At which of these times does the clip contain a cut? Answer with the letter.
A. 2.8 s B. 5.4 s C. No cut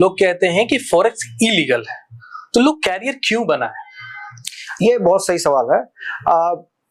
C